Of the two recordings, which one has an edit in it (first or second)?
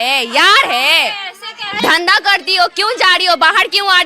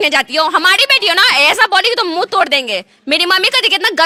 first